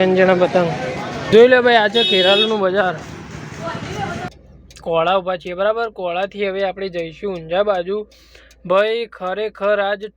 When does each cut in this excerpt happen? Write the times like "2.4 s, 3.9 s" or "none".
1.3 s, 4.3 s